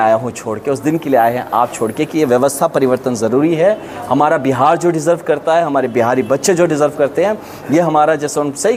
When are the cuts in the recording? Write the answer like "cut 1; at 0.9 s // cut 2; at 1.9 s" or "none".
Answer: none